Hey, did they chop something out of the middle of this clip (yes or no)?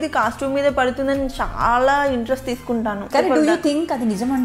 yes